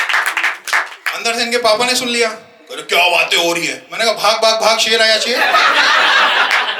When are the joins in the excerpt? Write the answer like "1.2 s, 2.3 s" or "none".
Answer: none